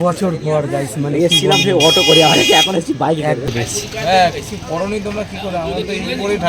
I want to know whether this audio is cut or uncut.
cut